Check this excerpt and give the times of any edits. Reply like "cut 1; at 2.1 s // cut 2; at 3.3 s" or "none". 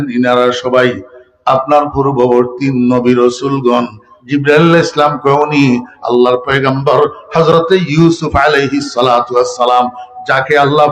cut 1; at 4.1 s